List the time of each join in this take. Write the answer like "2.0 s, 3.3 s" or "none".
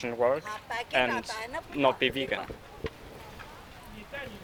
none